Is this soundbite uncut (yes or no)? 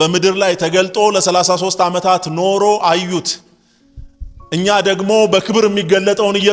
yes